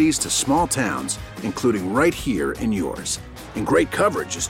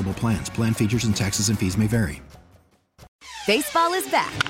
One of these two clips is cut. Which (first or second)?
second